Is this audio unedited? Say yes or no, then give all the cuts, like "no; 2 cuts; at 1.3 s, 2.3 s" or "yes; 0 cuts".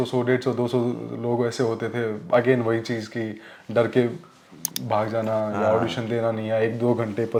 yes; 0 cuts